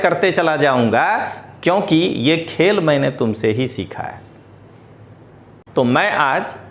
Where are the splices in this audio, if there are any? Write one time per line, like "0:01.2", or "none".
0:05.7